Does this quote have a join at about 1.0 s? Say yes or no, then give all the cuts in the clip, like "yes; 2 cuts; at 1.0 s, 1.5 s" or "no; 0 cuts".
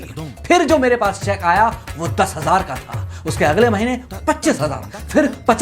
no; 0 cuts